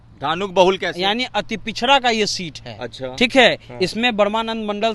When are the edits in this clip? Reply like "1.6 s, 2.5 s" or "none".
none